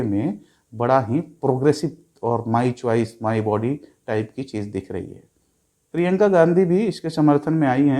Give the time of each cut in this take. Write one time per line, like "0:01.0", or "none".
none